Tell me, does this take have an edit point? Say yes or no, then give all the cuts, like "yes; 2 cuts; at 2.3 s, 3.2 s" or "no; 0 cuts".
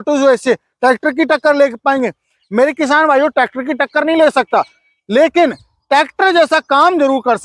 no; 0 cuts